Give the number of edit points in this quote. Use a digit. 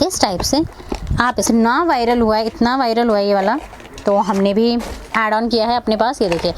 1